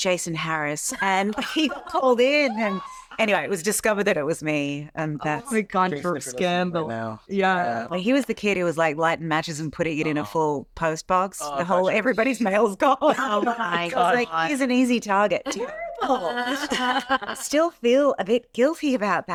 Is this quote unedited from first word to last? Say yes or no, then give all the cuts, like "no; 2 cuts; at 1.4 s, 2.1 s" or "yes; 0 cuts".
yes; 0 cuts